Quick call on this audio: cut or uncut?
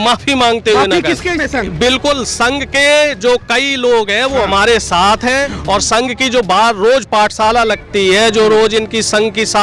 cut